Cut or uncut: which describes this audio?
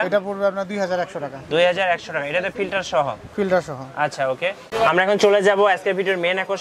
uncut